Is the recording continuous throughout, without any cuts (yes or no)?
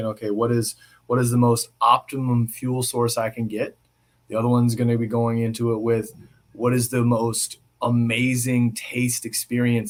yes